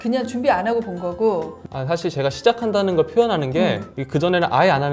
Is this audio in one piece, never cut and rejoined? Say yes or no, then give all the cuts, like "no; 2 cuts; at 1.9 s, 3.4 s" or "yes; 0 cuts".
yes; 0 cuts